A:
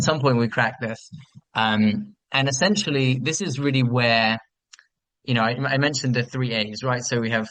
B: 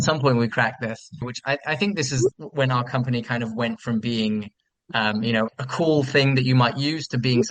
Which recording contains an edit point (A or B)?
B